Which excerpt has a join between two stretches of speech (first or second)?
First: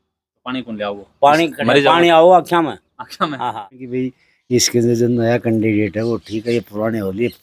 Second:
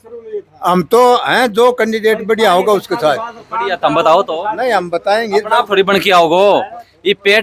first